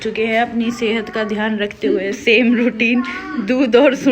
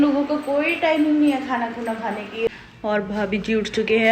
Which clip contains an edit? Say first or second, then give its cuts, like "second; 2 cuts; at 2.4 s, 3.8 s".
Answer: second; 1 cut; at 2.5 s